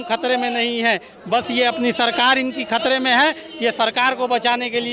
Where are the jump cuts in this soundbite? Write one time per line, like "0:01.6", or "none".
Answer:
none